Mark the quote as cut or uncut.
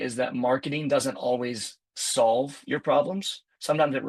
uncut